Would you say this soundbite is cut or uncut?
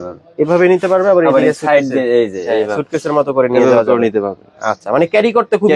uncut